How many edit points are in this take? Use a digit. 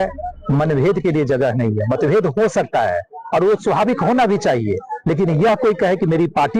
0